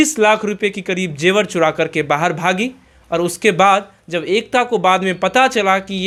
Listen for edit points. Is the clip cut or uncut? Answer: uncut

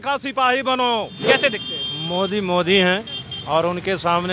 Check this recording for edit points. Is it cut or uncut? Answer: cut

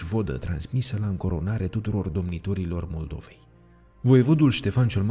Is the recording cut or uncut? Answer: uncut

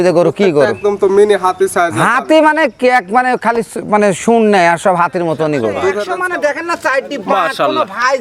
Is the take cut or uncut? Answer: cut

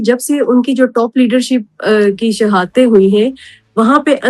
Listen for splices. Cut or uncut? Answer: uncut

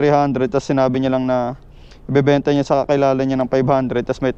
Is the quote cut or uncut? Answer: uncut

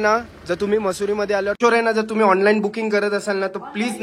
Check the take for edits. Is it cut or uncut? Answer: cut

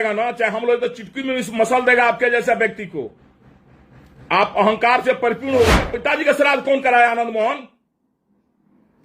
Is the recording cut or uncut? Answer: cut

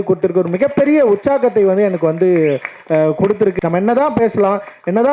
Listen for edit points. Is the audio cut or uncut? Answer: cut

